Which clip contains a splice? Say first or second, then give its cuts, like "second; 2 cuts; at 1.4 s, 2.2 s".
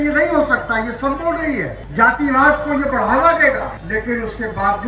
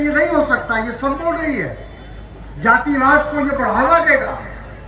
first; 2 cuts; at 1.8 s, 3.8 s